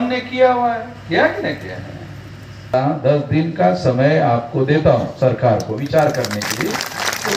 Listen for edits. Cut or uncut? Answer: cut